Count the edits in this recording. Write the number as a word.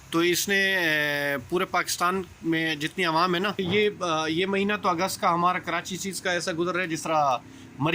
one